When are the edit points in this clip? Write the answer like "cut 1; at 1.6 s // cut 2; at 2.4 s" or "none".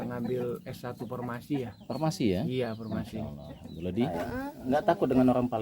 cut 1; at 4.1 s